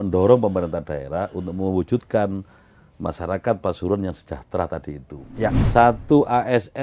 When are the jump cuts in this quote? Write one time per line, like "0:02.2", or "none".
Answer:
0:05.6